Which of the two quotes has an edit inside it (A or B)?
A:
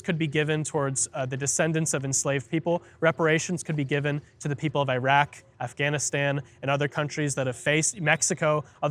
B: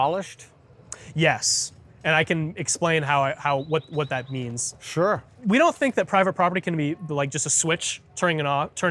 B